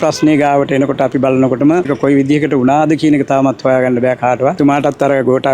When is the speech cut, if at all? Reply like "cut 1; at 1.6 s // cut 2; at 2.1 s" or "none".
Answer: cut 1; at 1.9 s // cut 2; at 4.6 s